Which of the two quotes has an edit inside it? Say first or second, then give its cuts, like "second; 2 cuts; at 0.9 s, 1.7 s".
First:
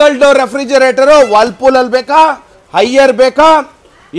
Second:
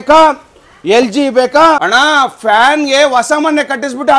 second; 1 cut; at 1.9 s